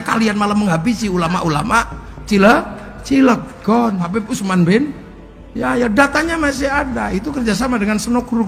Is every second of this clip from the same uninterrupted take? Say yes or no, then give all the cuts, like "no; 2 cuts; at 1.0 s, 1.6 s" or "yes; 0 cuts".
no; 1 cut; at 4.2 s